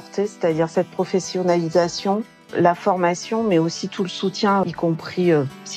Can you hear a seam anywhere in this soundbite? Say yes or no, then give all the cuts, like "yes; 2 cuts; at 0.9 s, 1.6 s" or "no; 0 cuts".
yes; 1 cut; at 4.6 s